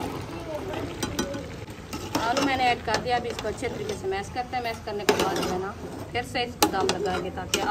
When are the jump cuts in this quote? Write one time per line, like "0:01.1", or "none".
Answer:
0:01.8